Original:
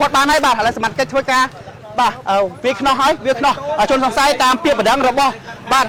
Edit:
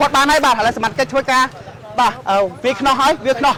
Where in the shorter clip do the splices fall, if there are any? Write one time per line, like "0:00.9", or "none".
none